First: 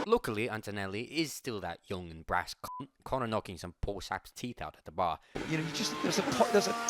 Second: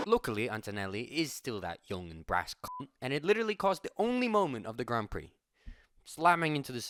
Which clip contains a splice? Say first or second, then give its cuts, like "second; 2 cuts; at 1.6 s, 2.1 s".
first; 2 cuts; at 3.0 s, 5.3 s